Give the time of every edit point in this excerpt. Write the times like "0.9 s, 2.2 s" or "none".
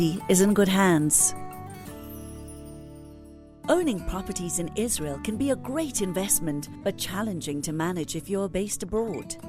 1.1 s, 3.5 s

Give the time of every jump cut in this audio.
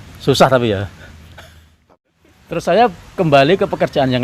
1.9 s

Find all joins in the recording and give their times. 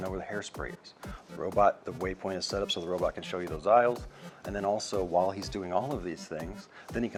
none

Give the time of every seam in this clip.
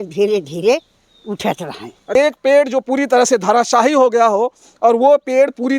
2.1 s

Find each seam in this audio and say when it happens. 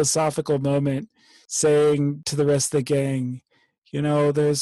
none

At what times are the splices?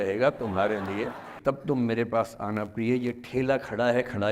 1.3 s

